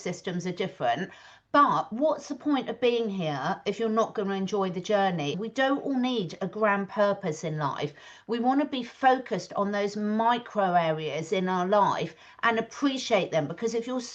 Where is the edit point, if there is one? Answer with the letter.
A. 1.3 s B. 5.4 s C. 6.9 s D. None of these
B